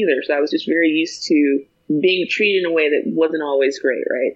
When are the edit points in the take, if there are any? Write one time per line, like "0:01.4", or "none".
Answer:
0:01.7